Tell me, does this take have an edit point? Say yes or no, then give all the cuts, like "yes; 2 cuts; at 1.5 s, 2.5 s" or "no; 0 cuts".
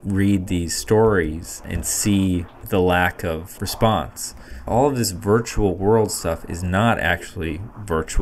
yes; 4 cuts; at 1.8 s, 2.5 s, 3.5 s, 4.5 s